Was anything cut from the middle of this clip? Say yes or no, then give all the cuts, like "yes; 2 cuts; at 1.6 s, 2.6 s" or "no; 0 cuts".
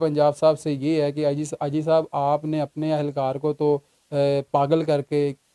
no; 0 cuts